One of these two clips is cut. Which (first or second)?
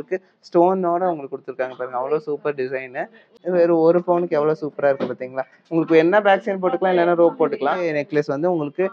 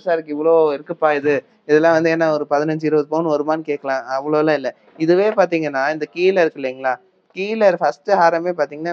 first